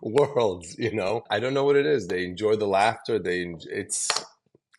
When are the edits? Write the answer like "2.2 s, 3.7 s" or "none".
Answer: 1.3 s